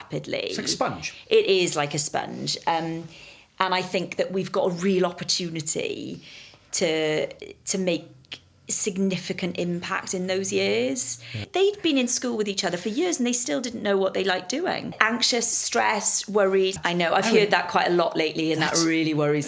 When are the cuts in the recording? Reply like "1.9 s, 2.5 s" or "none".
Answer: 11.4 s, 15.0 s, 16.7 s